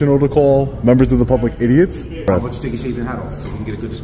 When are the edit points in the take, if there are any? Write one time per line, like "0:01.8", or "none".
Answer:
0:02.3